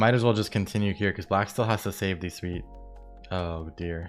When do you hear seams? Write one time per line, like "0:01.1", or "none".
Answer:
none